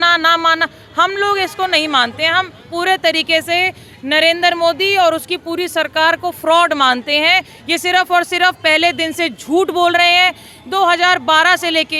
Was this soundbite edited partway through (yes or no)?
no